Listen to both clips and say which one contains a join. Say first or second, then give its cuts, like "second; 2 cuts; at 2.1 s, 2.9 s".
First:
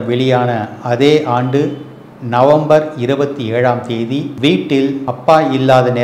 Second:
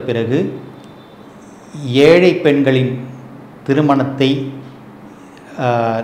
first; 2 cuts; at 4.3 s, 5.1 s